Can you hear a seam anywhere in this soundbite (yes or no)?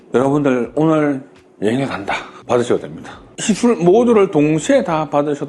no